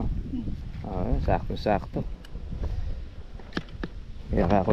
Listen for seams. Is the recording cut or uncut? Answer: uncut